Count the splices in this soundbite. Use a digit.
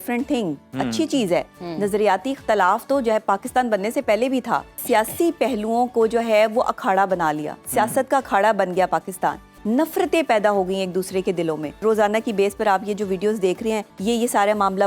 4